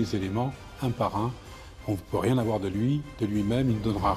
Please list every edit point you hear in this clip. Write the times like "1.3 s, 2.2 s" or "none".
none